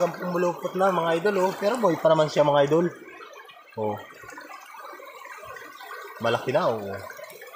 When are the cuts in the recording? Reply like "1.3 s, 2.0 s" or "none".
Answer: none